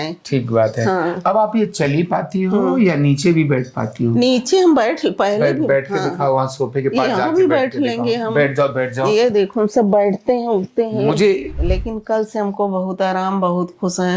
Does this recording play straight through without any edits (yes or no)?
no